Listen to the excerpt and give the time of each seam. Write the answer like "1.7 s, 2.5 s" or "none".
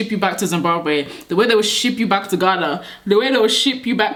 none